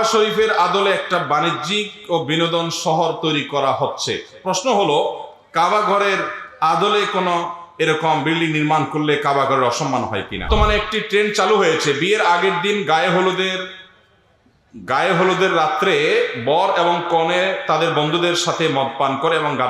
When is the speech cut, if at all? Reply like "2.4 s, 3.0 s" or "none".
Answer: 10.5 s